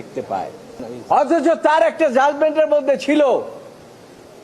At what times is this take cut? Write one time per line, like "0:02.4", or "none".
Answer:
0:00.9